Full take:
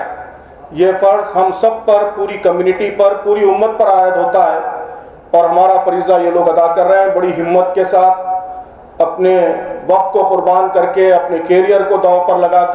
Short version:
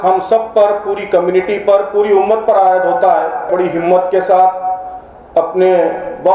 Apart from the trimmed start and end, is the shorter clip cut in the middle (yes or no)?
yes